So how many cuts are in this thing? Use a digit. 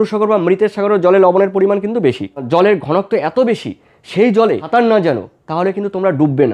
2